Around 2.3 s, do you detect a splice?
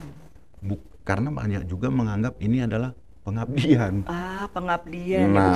no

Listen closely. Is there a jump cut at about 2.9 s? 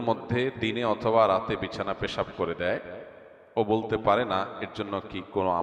no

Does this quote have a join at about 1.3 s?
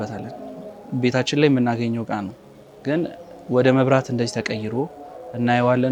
no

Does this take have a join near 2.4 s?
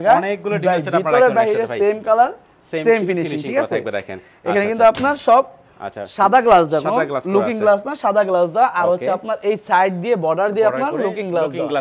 no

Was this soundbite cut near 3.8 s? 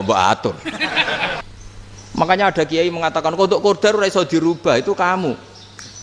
no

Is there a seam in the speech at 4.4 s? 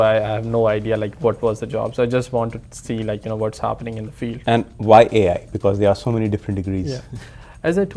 yes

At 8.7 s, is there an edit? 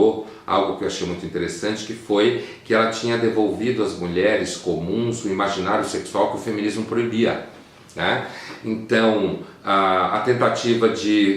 no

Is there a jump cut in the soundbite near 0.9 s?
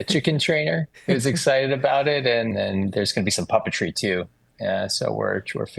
yes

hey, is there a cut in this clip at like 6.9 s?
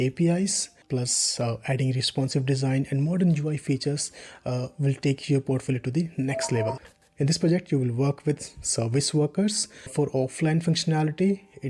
yes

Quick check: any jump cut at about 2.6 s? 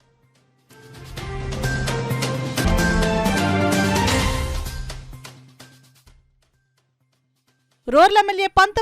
yes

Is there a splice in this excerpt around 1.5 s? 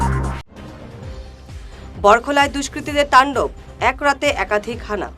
yes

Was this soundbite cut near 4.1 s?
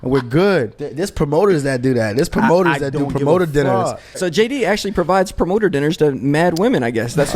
yes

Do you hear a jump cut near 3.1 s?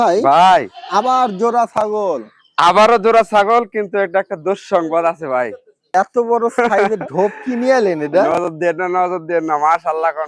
no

